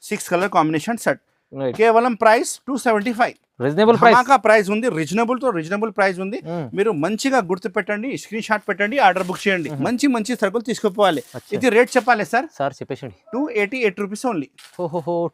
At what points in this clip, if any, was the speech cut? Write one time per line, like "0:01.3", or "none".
0:09.7